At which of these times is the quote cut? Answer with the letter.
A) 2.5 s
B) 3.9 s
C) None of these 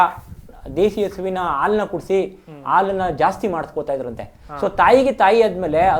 C